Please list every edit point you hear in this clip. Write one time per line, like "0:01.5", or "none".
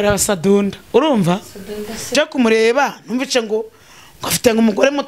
0:02.1